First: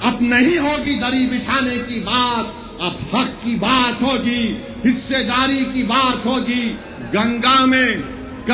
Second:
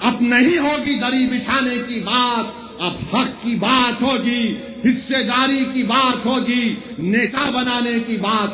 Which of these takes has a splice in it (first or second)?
first